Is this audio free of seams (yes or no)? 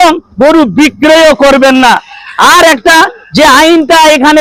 yes